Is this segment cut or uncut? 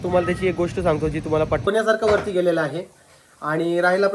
cut